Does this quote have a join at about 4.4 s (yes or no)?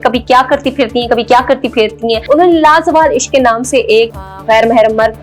yes